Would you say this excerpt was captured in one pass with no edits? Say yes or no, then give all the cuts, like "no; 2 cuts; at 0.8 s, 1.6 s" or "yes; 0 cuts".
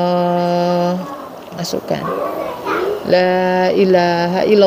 yes; 0 cuts